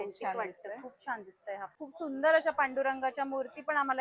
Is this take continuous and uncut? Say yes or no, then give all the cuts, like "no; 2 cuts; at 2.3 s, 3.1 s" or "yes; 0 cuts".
no; 1 cut; at 1.8 s